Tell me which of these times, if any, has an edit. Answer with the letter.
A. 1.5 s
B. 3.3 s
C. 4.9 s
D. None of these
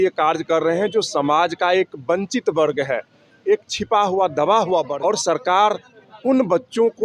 C